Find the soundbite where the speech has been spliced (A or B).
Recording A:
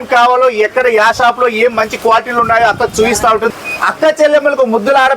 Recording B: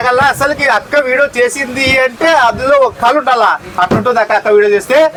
A